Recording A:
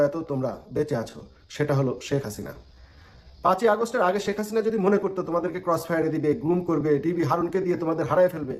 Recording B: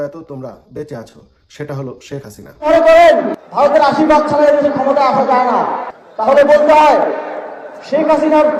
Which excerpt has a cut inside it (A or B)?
B